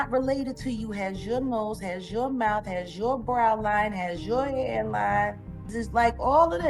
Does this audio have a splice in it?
yes; 1 cut; at 5.8 s

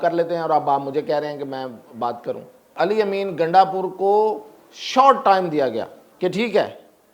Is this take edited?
yes; 2 cuts; at 2.7 s, 6.0 s

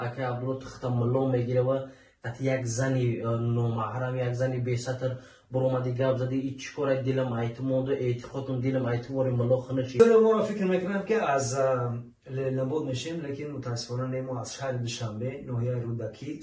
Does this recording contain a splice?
yes; 1 cut; at 10.0 s

